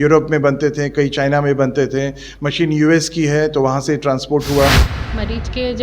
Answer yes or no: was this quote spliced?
yes